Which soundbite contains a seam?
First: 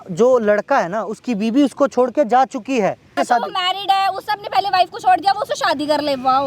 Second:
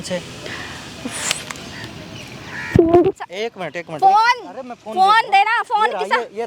first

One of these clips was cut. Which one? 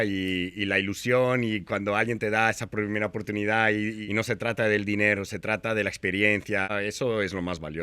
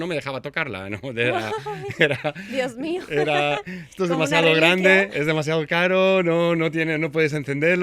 first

